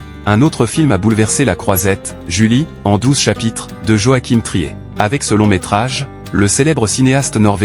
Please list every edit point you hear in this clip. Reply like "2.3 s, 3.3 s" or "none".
4.8 s